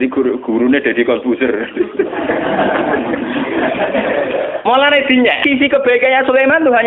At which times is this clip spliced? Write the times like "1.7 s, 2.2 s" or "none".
5.4 s

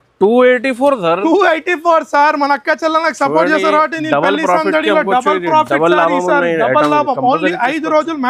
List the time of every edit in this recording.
none

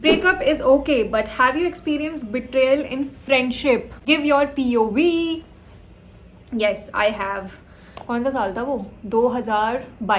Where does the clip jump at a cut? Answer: none

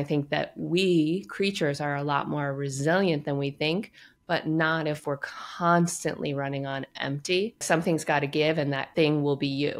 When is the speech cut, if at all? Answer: 7.6 s, 8.8 s

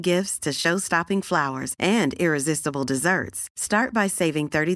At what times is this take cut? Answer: none

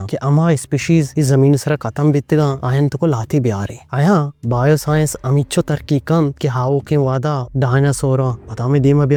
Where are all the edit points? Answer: none

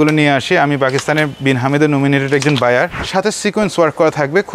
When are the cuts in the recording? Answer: 3.0 s

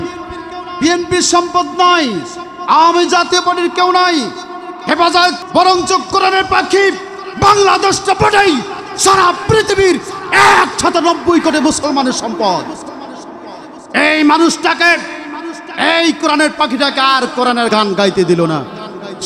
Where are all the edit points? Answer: 5.4 s, 17.7 s

